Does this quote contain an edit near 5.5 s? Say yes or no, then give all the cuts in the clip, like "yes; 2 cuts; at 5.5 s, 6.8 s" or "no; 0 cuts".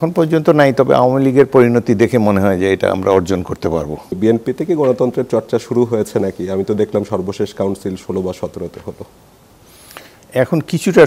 no; 1 cut; at 4.1 s